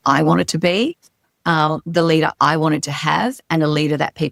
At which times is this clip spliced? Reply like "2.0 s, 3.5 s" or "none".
none